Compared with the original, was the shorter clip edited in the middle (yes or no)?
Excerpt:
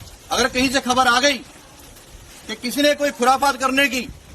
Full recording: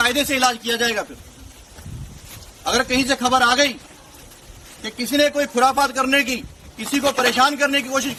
no